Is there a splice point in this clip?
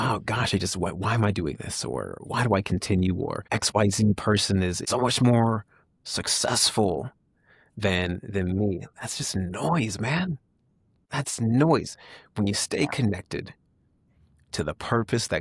yes; 3 cuts; at 2.2 s, 3.4 s, 4.8 s

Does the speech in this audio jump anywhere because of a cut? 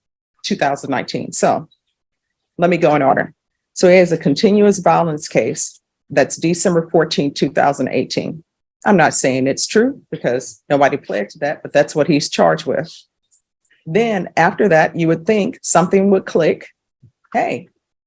no; 0 cuts

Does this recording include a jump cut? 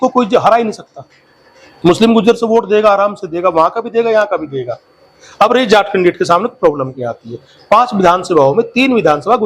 no; 0 cuts

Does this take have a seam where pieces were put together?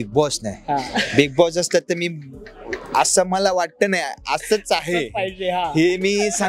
no; 0 cuts

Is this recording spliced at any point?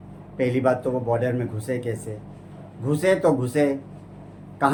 no; 0 cuts

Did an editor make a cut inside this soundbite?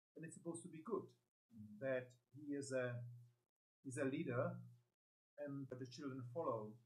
yes; 1 cut; at 5.7 s

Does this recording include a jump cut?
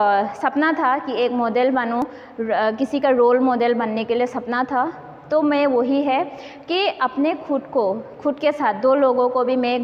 no; 0 cuts

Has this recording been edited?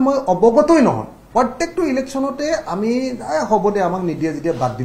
yes; 1 cut; at 1.1 s

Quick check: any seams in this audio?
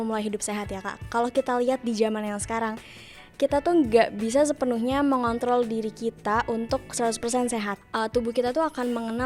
yes; 1 cut; at 7.8 s

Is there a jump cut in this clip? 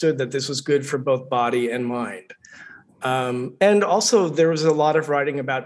no; 0 cuts

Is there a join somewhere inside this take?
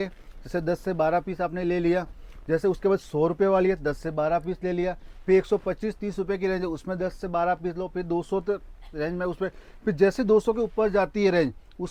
no; 0 cuts

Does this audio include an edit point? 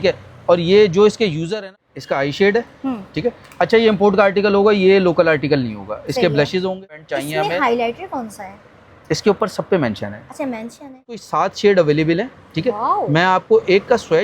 yes; 3 cuts; at 1.8 s, 7.1 s, 11.2 s

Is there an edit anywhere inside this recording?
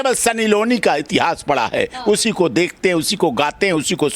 no; 0 cuts

